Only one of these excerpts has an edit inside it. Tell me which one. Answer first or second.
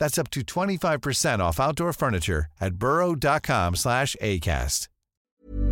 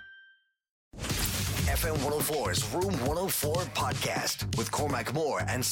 second